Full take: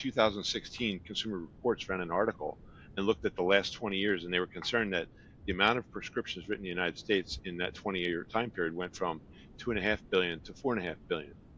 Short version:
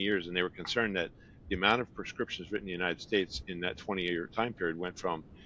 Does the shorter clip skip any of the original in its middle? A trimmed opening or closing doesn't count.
no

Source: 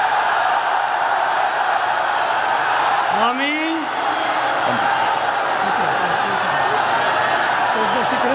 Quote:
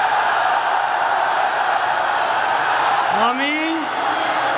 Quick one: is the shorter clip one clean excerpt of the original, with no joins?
yes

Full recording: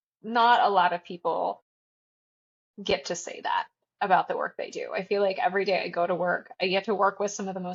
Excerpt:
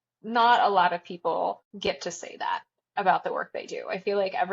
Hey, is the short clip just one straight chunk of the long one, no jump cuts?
no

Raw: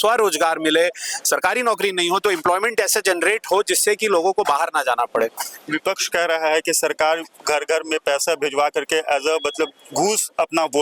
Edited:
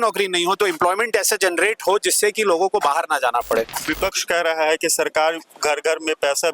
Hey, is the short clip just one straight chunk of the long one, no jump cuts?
no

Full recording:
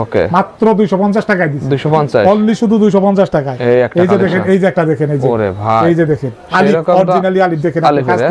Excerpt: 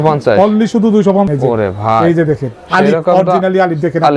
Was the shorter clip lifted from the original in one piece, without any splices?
no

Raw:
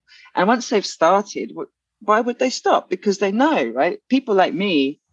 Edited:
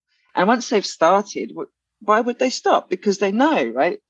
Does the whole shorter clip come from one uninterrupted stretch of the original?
yes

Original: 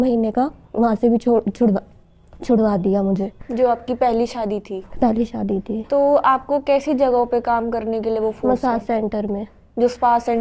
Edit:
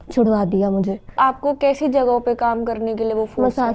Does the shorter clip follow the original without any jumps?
no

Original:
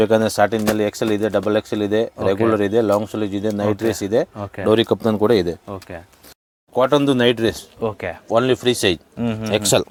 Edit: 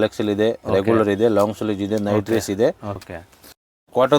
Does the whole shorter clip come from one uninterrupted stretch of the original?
no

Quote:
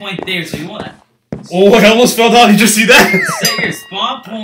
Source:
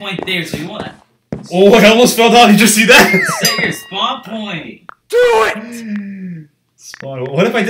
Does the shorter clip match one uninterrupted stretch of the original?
yes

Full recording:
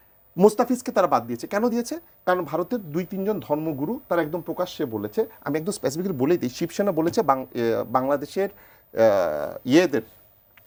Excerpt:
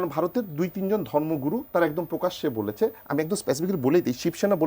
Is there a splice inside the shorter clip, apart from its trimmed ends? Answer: no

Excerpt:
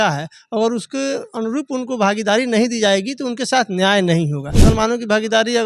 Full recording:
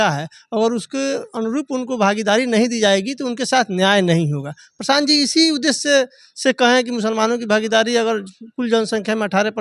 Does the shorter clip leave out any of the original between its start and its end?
yes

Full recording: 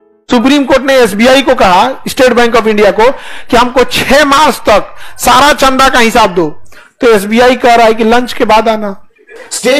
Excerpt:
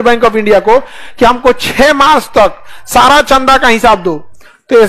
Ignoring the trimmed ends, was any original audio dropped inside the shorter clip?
no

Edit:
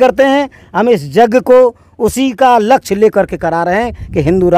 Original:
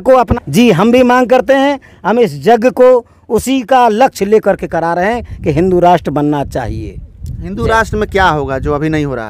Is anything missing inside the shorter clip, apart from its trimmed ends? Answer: no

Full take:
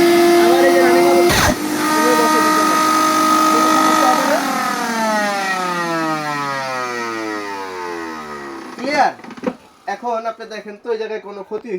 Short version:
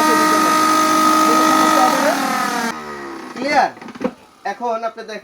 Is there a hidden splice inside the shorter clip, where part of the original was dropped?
yes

